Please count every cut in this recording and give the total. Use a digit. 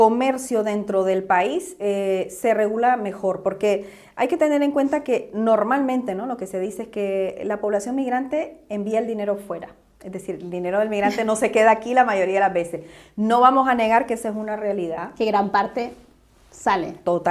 0